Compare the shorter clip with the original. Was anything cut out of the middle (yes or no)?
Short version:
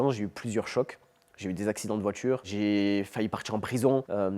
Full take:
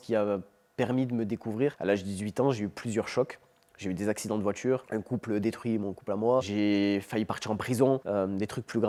yes